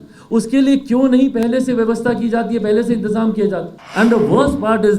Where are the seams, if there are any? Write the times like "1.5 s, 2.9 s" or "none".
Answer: 3.8 s